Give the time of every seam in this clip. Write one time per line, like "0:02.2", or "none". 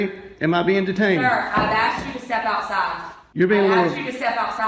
0:03.1